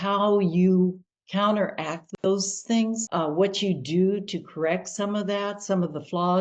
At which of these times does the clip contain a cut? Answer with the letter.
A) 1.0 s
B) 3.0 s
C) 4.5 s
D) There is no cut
B